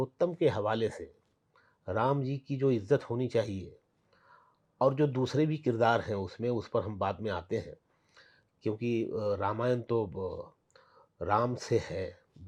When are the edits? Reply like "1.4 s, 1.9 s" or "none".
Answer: none